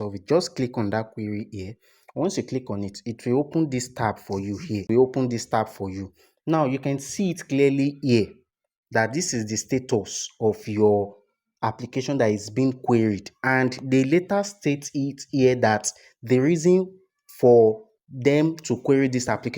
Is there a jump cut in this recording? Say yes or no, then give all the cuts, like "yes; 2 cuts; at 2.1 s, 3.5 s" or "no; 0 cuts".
yes; 1 cut; at 4.8 s